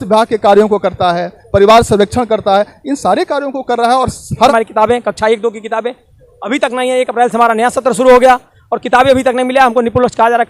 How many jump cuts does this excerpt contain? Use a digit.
1